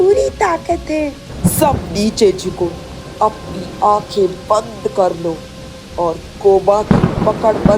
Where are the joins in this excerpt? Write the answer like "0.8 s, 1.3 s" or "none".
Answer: 1.3 s